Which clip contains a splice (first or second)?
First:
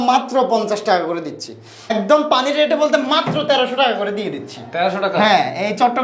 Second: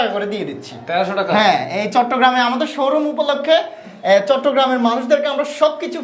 first